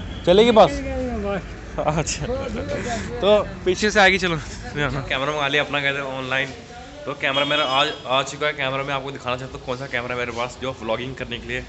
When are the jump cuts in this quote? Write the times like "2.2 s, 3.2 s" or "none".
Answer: 5.1 s